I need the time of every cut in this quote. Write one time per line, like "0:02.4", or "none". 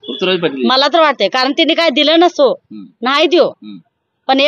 none